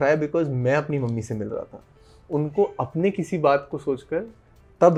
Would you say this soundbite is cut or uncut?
uncut